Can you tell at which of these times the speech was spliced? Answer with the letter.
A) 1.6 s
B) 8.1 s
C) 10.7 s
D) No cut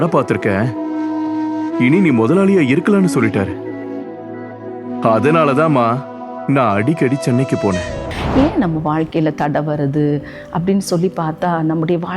B